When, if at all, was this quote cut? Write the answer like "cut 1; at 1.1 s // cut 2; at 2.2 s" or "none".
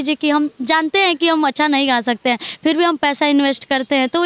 none